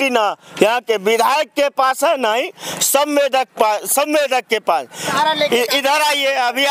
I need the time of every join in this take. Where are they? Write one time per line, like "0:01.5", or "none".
0:05.1

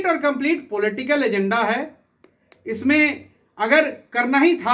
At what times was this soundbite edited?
none

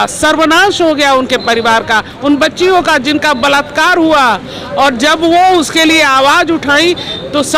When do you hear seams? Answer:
none

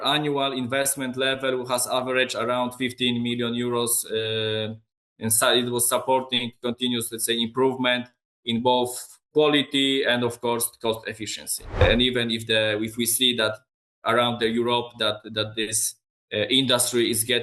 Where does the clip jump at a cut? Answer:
0:11.8

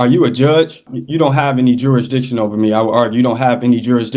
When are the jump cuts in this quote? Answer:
0:00.9

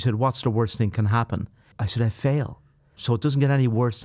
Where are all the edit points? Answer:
0:01.8
0:03.0

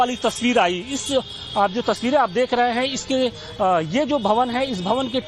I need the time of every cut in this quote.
0:03.4

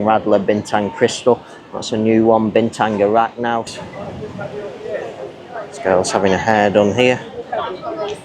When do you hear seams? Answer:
0:03.8

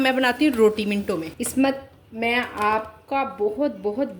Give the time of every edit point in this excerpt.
0:01.4

